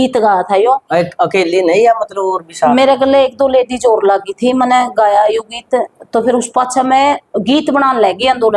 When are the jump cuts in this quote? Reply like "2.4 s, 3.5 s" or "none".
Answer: none